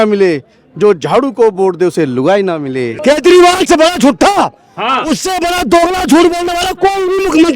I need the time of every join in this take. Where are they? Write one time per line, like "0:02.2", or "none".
0:02.9